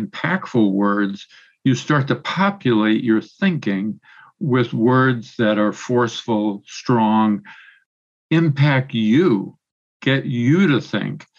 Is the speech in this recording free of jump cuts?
yes; 0 cuts

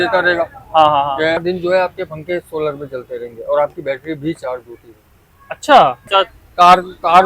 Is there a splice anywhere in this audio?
yes; 2 cuts; at 1.4 s, 6.1 s

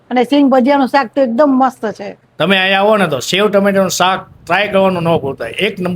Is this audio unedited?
no; 1 cut; at 2.3 s

